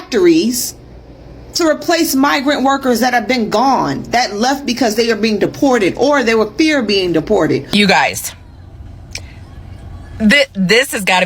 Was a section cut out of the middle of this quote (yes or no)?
yes